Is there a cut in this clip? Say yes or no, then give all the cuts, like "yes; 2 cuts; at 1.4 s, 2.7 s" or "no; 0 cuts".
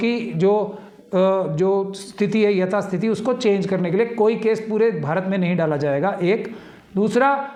no; 0 cuts